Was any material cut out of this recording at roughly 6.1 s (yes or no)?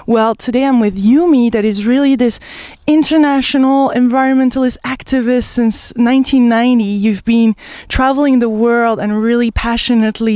yes